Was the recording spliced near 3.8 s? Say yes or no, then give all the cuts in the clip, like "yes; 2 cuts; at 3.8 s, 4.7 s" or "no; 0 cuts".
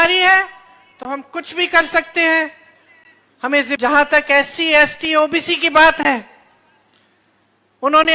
yes; 1 cut; at 3.8 s